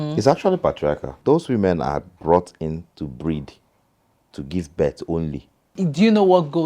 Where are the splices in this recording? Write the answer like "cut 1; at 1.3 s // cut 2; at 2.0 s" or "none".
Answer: cut 1; at 1.1 s // cut 2; at 5.7 s